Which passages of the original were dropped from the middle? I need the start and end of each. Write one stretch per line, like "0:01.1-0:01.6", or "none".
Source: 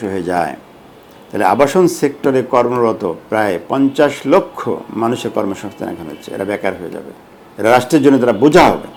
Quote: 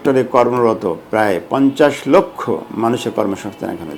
none